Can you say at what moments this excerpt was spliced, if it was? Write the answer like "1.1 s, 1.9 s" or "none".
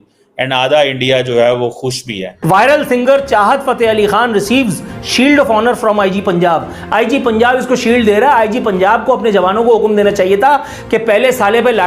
2.3 s